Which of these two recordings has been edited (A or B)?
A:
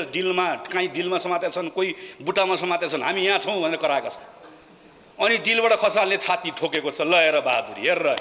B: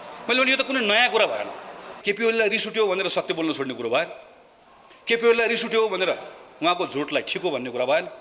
B